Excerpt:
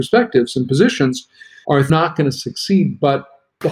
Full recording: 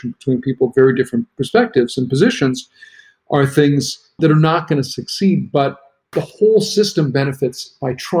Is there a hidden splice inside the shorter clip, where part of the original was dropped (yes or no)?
yes